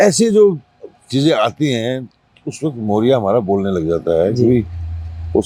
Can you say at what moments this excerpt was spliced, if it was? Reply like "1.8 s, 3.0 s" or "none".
none